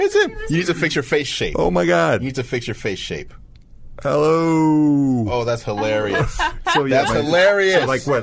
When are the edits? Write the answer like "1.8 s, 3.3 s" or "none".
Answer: none